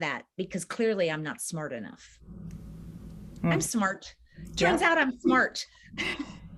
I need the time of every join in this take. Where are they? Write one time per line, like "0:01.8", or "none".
none